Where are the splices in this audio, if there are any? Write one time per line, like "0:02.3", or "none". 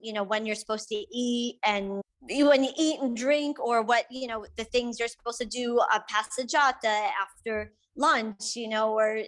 0:02.1